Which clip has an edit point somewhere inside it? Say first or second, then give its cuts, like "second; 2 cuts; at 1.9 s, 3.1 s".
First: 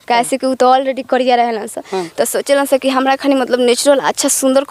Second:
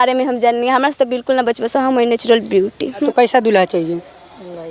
second; 1 cut; at 3.0 s